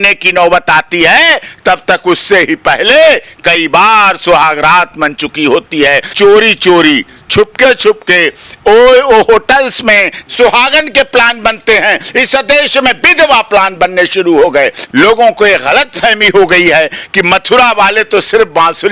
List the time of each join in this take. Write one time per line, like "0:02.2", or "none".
0:06.1
0:10.2
0:14.8